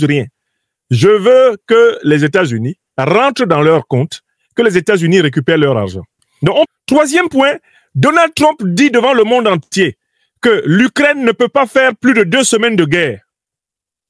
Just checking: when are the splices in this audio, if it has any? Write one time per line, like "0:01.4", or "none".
0:06.7